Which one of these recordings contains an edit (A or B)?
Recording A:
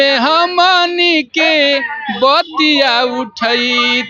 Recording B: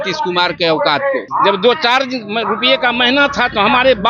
B